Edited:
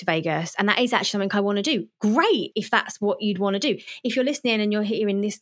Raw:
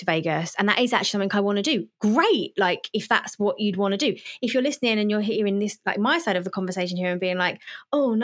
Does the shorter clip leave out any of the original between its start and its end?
yes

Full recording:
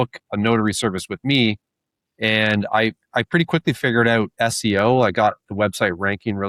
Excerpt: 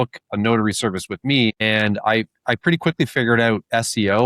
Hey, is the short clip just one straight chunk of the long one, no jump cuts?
no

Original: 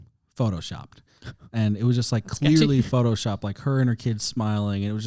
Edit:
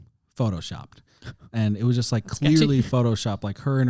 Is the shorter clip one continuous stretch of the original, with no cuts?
yes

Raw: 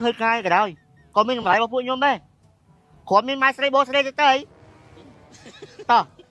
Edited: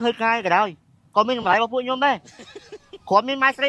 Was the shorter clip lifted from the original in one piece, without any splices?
yes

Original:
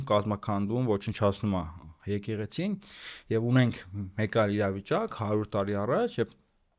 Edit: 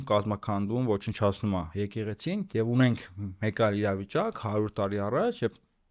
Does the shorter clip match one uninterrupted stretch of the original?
no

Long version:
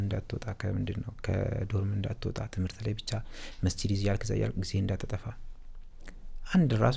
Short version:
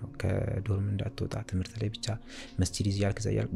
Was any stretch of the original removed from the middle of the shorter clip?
no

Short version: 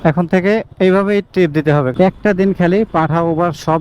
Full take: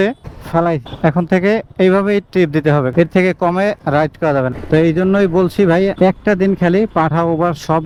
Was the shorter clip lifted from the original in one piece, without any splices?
no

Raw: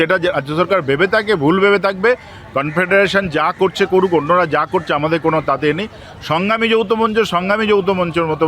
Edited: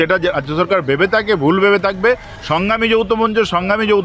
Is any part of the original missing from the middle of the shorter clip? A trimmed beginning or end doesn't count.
yes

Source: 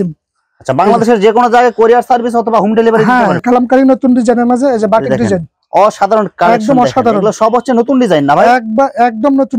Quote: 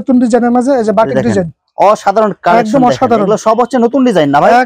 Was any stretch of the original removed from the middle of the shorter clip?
no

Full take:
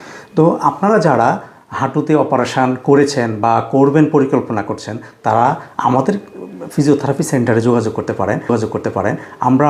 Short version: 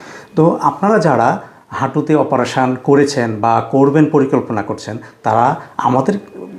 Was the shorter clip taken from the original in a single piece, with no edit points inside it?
yes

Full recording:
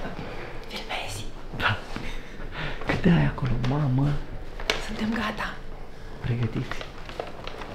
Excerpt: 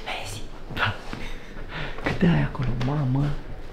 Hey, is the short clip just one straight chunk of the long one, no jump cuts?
yes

